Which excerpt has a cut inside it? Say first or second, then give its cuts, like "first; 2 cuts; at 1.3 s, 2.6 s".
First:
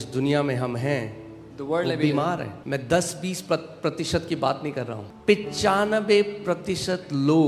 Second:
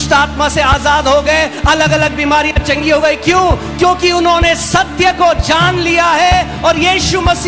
first; 2 cuts; at 2.5 s, 5.0 s